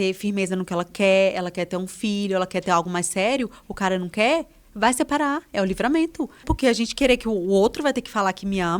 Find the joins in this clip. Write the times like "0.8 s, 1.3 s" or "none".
6.4 s

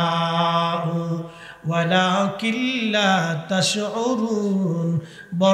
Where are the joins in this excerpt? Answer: none

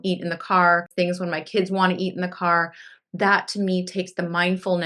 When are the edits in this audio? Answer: 0.9 s

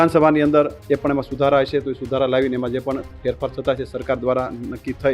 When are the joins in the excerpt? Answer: none

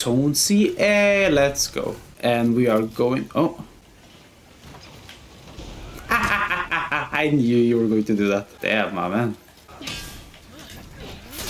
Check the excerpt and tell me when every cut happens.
none

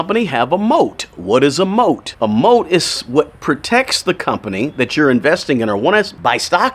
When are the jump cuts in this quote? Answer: none

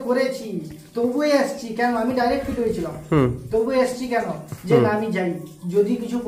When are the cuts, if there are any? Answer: none

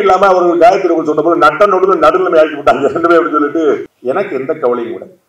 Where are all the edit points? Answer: 3.9 s

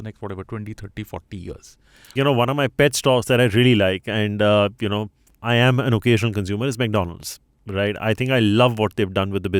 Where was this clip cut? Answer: 2.1 s

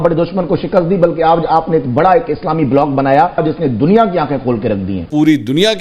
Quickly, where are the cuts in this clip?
3.4 s, 5.0 s

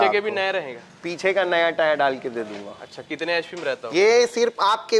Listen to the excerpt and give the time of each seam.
none

